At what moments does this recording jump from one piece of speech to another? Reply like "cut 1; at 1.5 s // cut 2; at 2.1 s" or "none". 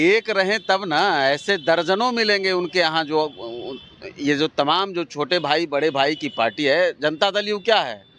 none